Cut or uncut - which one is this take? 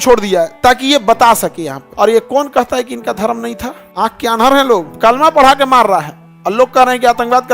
cut